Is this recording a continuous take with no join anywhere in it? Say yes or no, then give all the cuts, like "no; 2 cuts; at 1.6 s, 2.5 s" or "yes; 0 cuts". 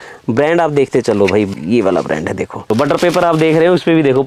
no; 1 cut; at 2.7 s